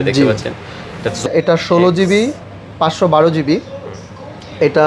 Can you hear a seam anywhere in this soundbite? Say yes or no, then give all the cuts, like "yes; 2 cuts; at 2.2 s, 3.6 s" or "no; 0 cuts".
yes; 1 cut; at 1.3 s